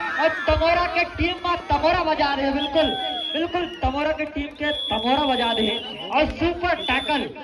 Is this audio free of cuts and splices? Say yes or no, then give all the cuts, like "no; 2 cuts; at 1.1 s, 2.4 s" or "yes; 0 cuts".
yes; 0 cuts